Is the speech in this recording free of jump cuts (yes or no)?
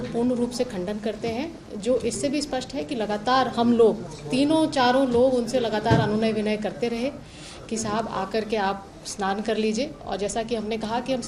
yes